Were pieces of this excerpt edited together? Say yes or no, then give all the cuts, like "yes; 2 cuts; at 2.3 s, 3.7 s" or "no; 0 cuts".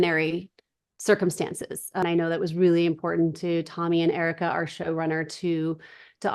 yes; 1 cut; at 2.0 s